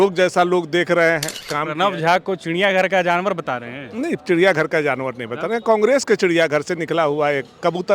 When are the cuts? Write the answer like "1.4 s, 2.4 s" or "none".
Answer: 1.5 s